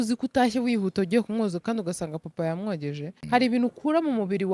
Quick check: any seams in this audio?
yes; 1 cut; at 3.1 s

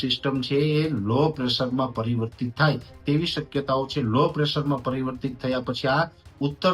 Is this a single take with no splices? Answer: yes; 0 cuts

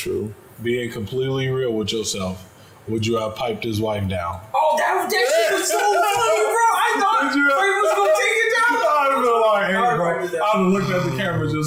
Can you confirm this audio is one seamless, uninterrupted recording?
yes; 0 cuts

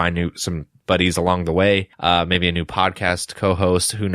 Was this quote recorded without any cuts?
no; 1 cut; at 1.9 s

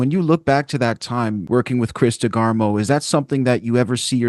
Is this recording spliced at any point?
yes; 1 cut; at 1.4 s

